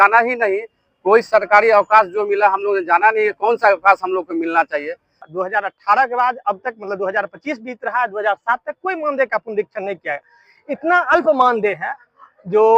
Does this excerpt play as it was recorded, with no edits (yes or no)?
no